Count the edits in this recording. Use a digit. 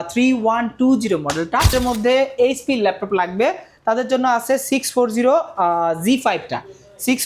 1